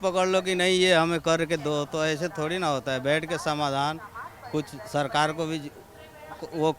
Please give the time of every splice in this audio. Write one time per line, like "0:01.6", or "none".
none